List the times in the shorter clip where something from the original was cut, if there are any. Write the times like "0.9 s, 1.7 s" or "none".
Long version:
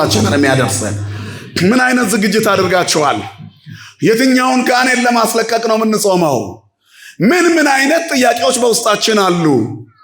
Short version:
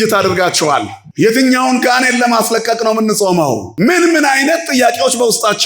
1.0 s, 3.7 s